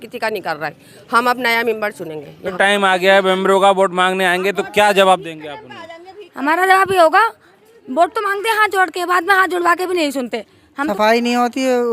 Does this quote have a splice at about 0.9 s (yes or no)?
no